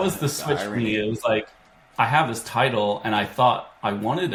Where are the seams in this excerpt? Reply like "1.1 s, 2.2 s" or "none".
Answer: none